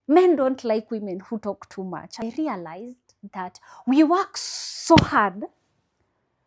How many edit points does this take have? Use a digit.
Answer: 1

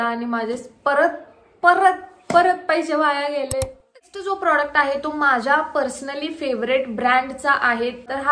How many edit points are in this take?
0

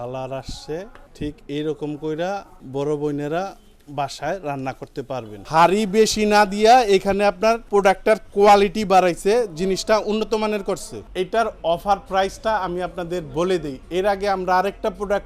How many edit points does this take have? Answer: 5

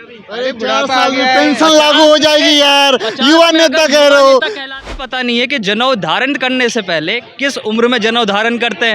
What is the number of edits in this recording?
1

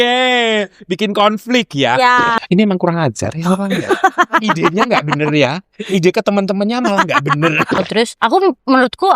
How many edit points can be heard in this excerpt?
2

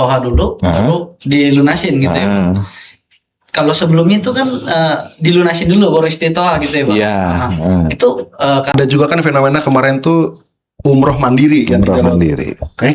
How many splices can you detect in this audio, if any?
1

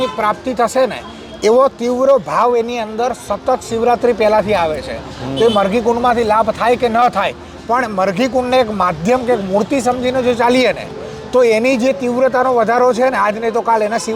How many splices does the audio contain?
0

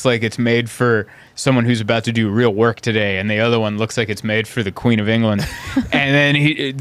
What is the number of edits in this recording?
0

